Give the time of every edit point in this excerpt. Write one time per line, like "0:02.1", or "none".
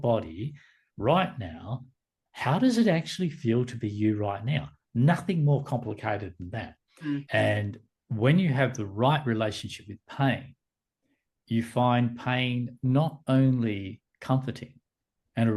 0:07.3